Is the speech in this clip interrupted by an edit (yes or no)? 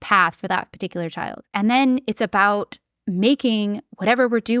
yes